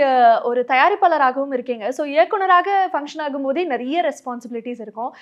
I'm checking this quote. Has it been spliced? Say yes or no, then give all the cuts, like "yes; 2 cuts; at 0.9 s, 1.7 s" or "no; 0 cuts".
no; 0 cuts